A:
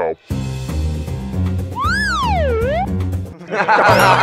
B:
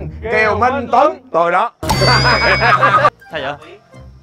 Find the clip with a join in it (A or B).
B